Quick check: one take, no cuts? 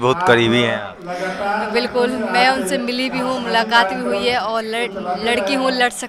yes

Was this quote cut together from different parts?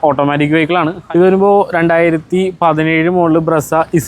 yes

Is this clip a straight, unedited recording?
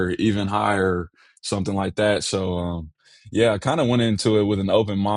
yes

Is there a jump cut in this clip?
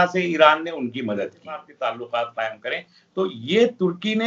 yes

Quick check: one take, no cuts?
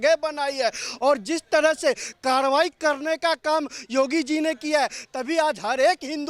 yes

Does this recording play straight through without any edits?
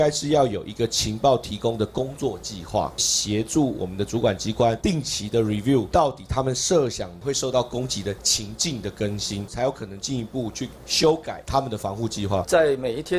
no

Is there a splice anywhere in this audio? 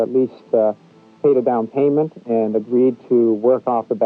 no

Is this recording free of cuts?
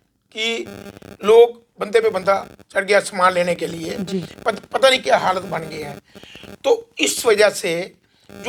yes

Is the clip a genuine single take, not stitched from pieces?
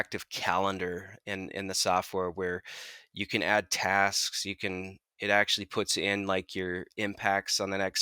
yes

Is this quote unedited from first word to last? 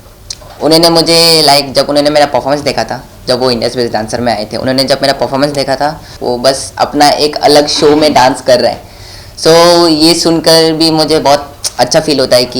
no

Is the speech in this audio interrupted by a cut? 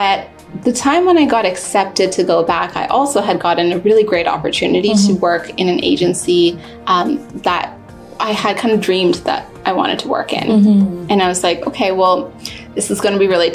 no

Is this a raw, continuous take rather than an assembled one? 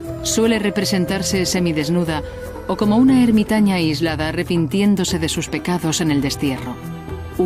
yes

